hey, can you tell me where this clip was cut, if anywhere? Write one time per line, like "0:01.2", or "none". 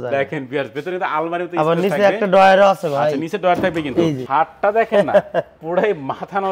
0:04.2